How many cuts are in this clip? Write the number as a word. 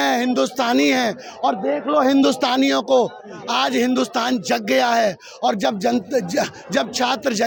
zero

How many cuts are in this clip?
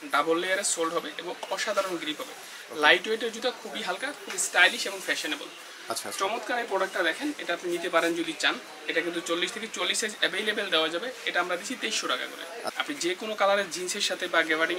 one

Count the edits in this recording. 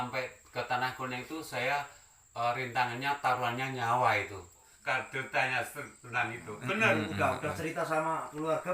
one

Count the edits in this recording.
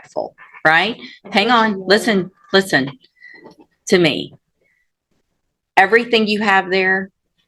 zero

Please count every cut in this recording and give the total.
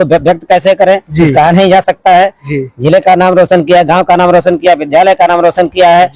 zero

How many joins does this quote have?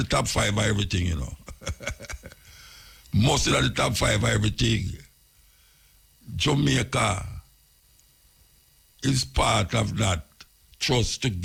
zero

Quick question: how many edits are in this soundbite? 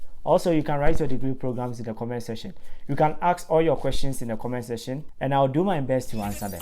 one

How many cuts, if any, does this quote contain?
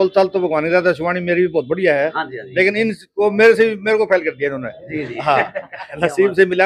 zero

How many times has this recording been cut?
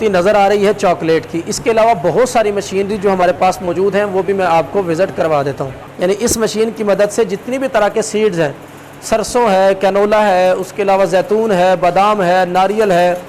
one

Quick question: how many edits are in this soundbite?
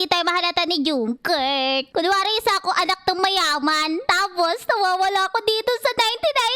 one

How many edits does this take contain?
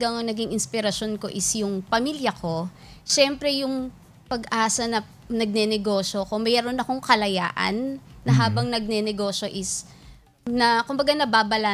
zero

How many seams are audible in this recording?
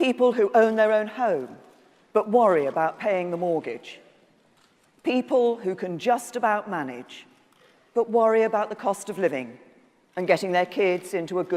one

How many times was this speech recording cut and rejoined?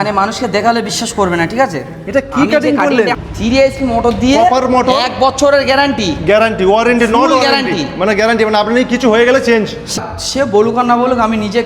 two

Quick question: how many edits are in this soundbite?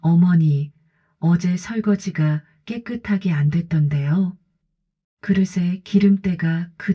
zero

